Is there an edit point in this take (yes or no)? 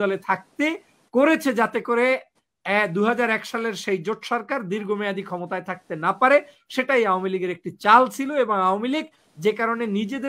no